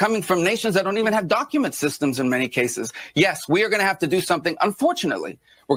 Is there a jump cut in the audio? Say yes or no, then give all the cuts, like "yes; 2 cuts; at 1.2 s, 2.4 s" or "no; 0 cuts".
no; 0 cuts